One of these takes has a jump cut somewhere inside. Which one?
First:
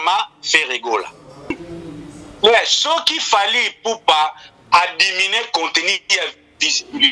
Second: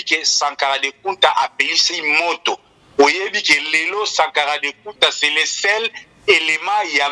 first; 1 cut; at 1.6 s

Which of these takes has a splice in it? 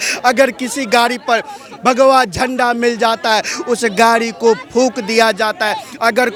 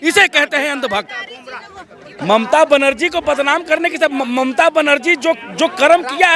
second; 1 cut; at 2.1 s

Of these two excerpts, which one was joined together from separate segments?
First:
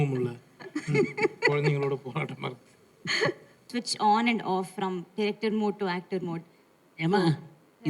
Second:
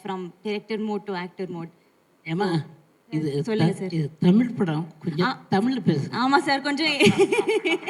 first; 1 cut; at 3.7 s

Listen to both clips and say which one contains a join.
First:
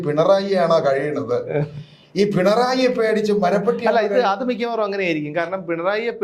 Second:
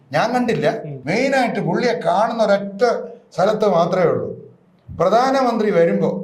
second; 1 cut; at 0.9 s

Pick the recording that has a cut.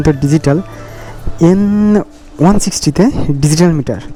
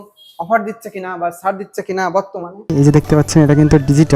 second; 1 cut; at 2.7 s

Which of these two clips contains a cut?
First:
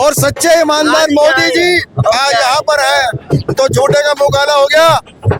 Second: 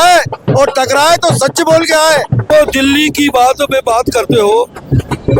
second; 1 cut; at 2.5 s

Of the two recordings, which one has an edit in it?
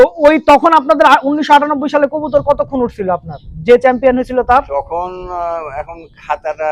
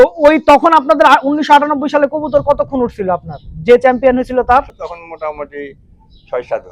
second; 1 cut; at 4.7 s

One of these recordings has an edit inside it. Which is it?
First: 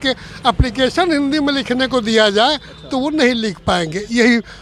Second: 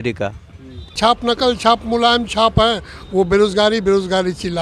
second; 1 cut; at 1.0 s

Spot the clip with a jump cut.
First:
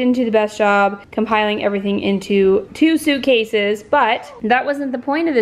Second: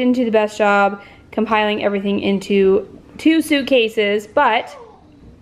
first; 3 cuts; at 1.0 s, 2.7 s, 4.3 s

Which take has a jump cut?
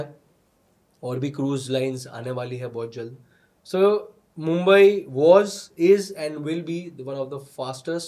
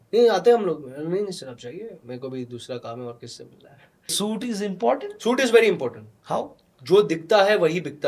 second; 1 cut; at 4.1 s

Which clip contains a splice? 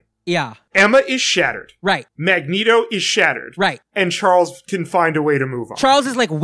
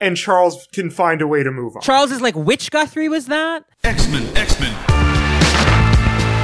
second; 1 cut; at 3.7 s

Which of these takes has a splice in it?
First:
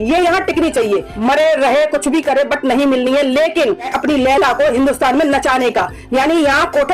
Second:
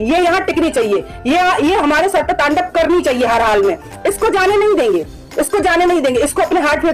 first; 2 cuts; at 1.1 s, 3.9 s

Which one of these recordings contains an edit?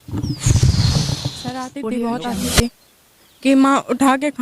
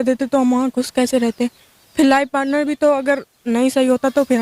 first; 1 cut; at 1.6 s

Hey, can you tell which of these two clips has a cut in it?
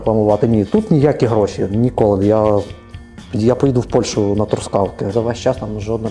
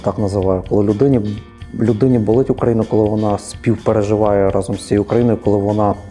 first; 1 cut; at 5.1 s

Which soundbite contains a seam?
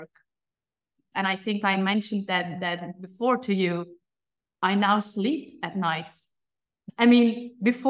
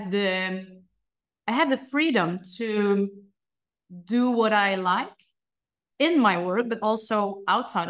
first; 2 cuts; at 1.0 s, 6.7 s

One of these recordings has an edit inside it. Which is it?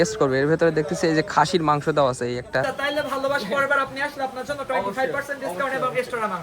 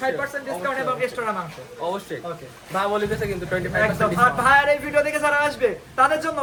first; 1 cut; at 2.7 s

